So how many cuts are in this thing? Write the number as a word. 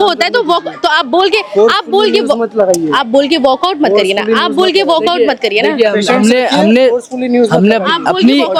zero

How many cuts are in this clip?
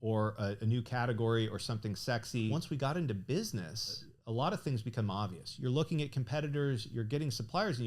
two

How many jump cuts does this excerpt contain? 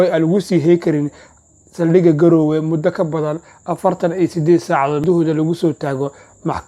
one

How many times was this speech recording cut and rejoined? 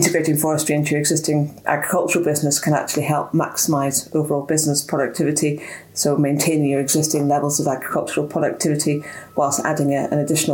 zero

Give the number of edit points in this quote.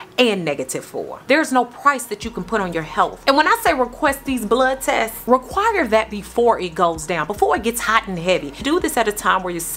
three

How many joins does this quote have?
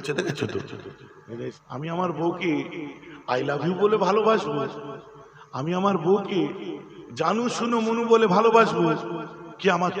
one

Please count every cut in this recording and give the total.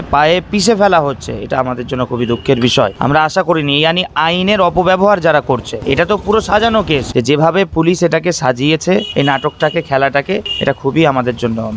three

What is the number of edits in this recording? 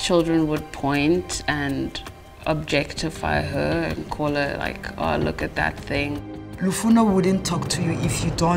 one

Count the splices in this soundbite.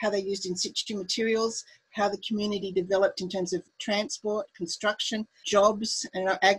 two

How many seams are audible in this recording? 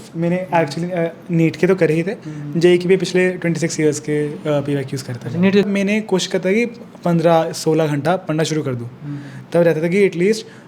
one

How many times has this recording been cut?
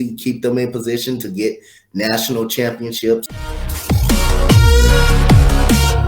one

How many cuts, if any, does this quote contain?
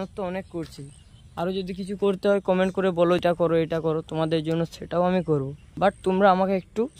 two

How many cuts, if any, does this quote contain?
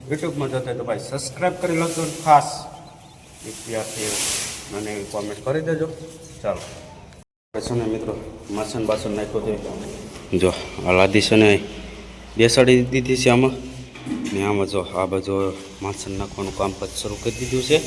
zero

